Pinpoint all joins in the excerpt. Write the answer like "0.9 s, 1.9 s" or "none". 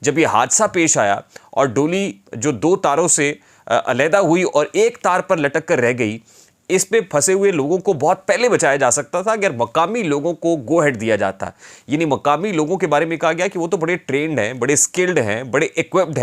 none